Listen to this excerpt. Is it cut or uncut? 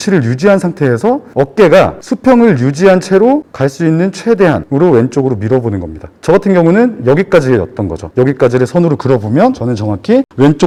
uncut